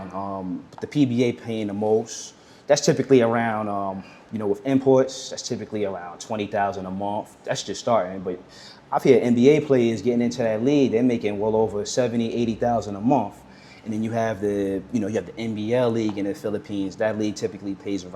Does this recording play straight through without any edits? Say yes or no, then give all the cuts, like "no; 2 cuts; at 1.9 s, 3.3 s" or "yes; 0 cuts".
yes; 0 cuts